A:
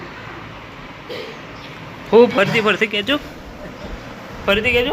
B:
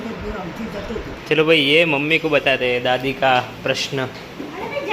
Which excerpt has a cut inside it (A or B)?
B